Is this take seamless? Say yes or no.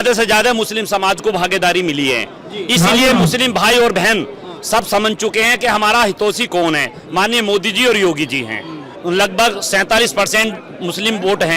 no